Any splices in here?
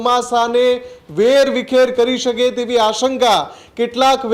no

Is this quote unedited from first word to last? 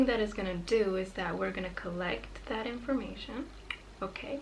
yes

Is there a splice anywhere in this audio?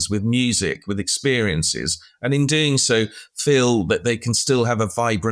no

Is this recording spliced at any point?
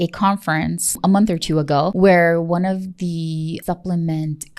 yes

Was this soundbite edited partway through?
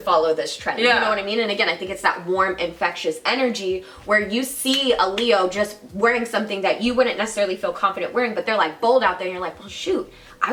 no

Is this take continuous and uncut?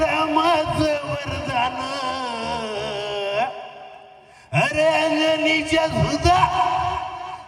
yes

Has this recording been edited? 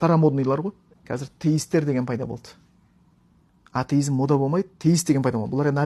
yes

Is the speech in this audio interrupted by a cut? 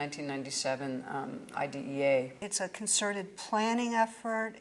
yes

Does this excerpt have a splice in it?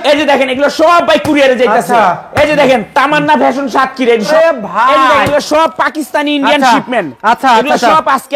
yes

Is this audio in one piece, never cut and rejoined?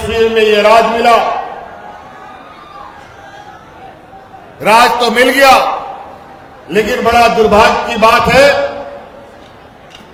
yes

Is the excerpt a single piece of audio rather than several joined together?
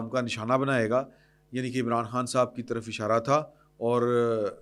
yes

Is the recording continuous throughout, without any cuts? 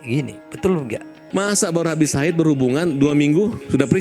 no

